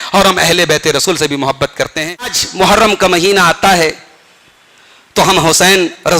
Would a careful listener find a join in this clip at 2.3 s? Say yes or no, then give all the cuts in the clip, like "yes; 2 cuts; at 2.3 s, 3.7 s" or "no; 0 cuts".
yes; 1 cut; at 2.3 s